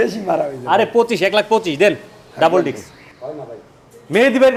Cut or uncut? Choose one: uncut